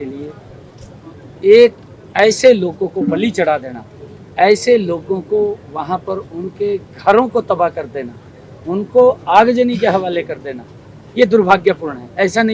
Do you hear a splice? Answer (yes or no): no